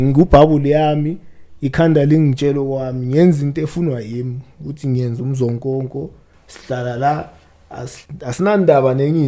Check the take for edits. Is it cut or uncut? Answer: uncut